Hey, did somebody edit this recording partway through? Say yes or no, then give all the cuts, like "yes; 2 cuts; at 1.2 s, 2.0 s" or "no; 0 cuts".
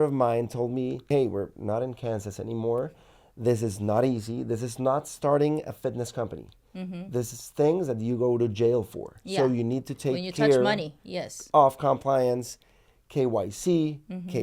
yes; 1 cut; at 1.1 s